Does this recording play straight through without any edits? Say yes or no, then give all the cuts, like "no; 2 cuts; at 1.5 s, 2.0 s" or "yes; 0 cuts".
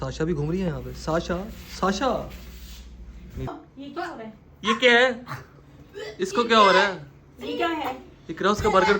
no; 1 cut; at 3.5 s